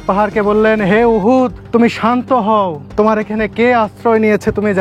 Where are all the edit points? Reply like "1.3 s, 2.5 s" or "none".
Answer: 1.6 s, 2.8 s